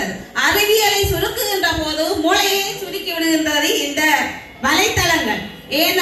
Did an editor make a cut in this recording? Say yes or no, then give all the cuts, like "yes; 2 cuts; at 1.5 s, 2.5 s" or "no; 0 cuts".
no; 0 cuts